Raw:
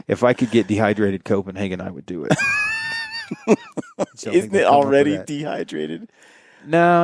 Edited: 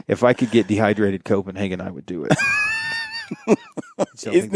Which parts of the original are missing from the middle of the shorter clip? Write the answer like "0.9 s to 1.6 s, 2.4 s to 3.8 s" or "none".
none